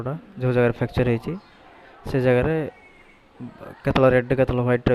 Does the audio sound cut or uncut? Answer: uncut